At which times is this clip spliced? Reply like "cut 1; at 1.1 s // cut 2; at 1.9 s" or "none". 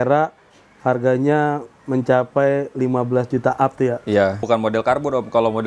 cut 1; at 4.4 s